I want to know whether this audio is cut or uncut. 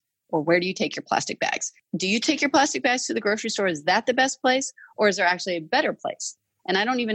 cut